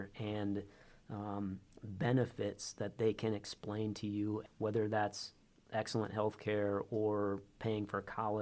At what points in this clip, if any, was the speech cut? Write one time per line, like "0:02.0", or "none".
0:04.5